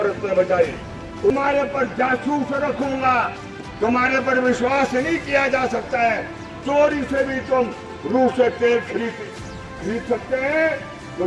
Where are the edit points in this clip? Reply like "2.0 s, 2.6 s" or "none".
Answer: 1.3 s